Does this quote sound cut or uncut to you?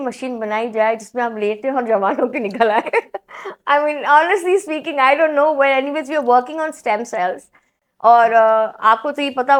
uncut